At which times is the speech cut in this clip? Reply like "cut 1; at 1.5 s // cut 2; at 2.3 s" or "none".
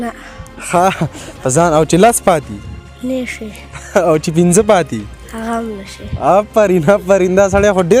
none